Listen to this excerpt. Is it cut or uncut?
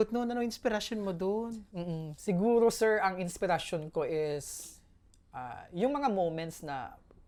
uncut